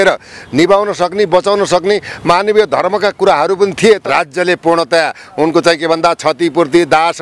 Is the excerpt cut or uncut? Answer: cut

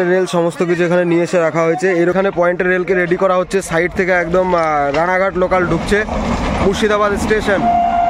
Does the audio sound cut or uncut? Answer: cut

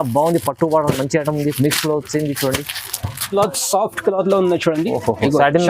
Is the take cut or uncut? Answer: cut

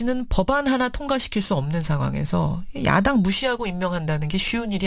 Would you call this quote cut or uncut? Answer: uncut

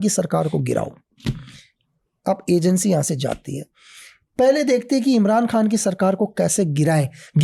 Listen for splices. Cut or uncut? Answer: uncut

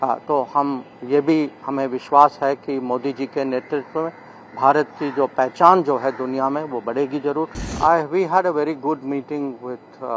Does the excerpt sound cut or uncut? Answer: cut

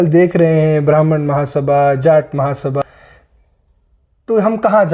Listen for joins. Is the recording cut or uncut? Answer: uncut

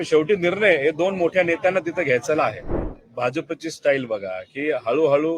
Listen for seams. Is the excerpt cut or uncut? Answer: cut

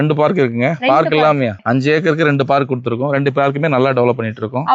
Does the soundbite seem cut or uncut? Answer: uncut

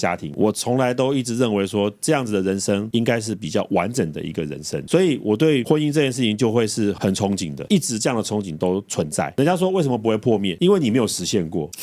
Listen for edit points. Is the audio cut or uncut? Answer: cut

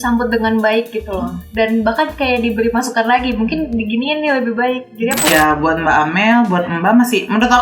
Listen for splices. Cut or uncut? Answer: cut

